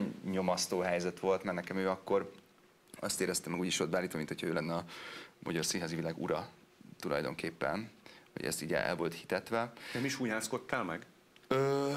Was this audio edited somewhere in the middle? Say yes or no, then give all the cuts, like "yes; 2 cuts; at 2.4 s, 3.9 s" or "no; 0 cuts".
no; 0 cuts